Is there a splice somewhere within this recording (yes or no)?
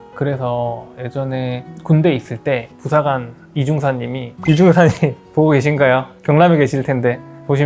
yes